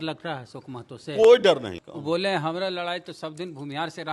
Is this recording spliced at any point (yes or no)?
yes